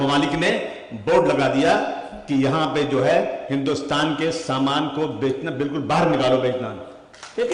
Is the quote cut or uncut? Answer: uncut